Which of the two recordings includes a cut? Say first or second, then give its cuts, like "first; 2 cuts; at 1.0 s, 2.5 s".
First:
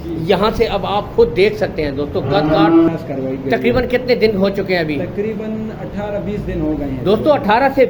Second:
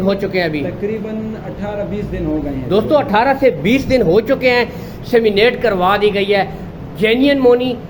first; 1 cut; at 2.9 s